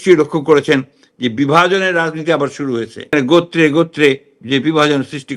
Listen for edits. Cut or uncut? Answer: cut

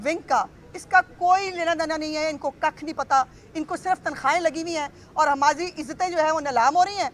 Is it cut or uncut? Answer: uncut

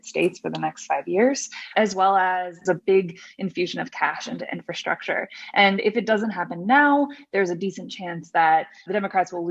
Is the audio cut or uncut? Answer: cut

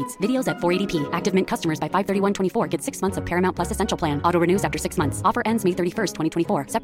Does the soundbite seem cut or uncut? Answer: uncut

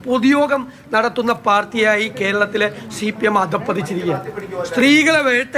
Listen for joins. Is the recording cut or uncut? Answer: uncut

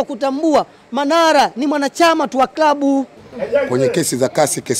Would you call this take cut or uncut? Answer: cut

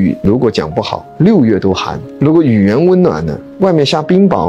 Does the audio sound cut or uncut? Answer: uncut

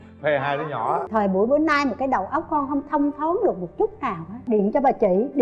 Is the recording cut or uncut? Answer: cut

